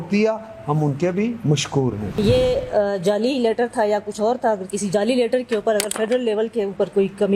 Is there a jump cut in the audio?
yes; 1 cut; at 2.2 s

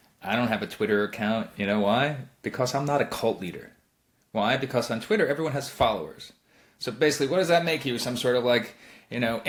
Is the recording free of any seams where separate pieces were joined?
yes; 0 cuts

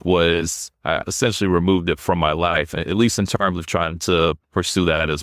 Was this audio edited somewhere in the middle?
yes; 2 cuts; at 1.0 s, 2.8 s

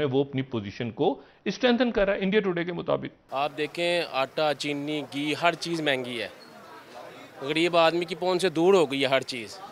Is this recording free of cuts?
no; 1 cut; at 3.2 s

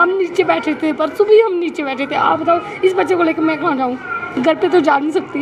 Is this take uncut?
yes; 0 cuts

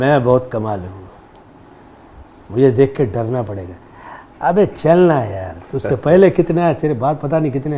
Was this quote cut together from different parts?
no; 0 cuts

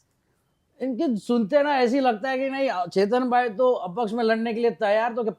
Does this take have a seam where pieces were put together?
no; 0 cuts

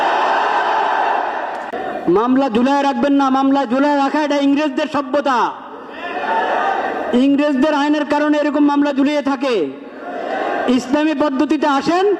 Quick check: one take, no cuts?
no; 1 cut; at 1.7 s

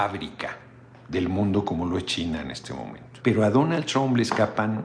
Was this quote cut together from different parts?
yes; 1 cut; at 3.0 s

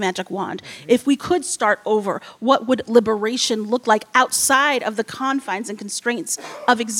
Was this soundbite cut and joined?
no; 0 cuts

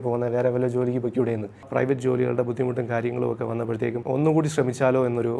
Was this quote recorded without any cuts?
no; 2 cuts; at 1.7 s, 4.0 s

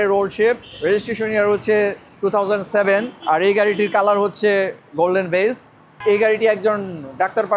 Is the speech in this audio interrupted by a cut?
yes; 2 cuts; at 2.1 s, 6.0 s

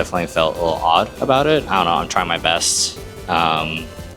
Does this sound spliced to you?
no; 0 cuts

